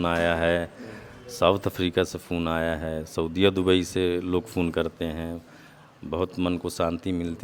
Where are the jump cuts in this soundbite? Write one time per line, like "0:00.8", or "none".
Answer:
none

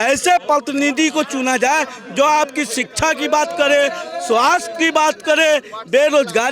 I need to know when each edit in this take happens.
none

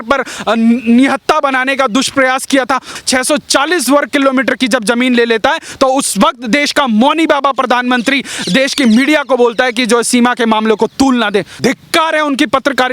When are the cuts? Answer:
0:02.9
0:11.6

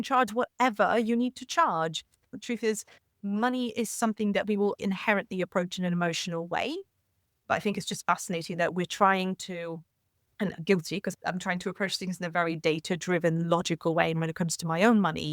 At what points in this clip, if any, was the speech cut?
0:02.2
0:04.8
0:07.4
0:11.1

